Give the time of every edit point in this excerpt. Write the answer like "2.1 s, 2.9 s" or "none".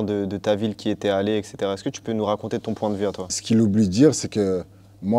2.2 s, 3.3 s

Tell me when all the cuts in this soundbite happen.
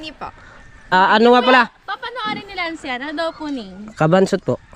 0.9 s

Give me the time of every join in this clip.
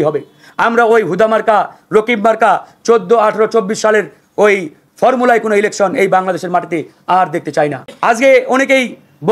7.9 s

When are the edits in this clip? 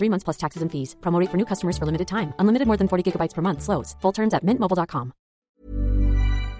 5.5 s

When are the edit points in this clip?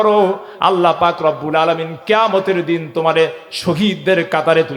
none

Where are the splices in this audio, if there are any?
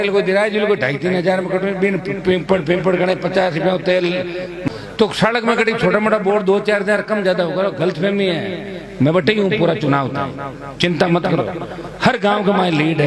4.7 s

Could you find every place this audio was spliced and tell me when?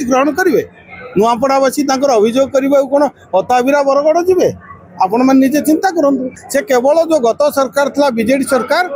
6.3 s

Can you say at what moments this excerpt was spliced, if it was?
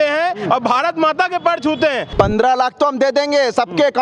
2.1 s

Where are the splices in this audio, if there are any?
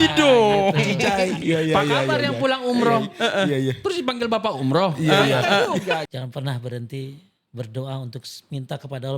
1.4 s, 6.0 s

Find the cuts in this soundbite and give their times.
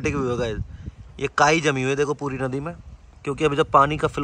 none

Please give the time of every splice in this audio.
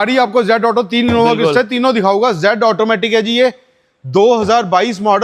none

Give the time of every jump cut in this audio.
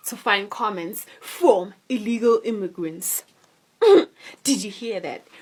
none

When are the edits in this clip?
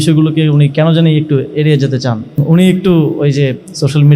2.4 s

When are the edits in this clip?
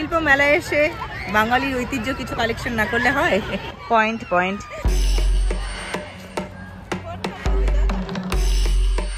none

